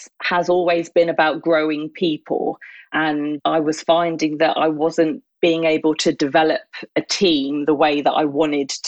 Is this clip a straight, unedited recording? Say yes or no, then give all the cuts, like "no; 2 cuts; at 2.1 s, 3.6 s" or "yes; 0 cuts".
no; 1 cut; at 3.1 s